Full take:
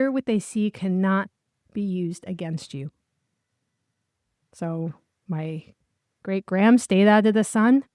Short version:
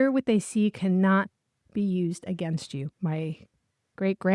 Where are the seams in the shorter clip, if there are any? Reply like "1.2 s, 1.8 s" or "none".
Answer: 2.9 s